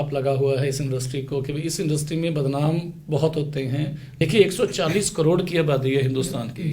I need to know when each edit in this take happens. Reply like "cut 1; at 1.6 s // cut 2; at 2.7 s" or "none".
cut 1; at 4.2 s